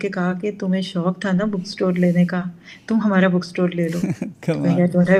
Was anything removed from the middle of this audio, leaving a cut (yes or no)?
no